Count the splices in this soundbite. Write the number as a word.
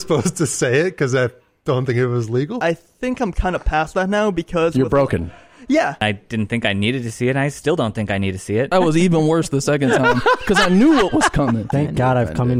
four